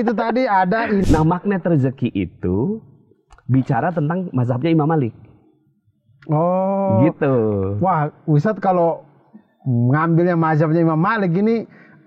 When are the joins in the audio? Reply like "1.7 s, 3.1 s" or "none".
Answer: 1.0 s